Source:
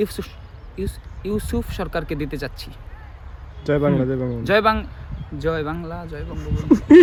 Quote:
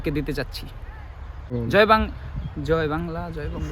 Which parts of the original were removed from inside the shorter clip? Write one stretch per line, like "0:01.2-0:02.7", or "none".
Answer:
0:03.6-0:04.3